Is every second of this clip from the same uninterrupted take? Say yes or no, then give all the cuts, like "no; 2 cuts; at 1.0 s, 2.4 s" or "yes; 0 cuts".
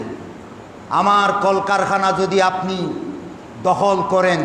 yes; 0 cuts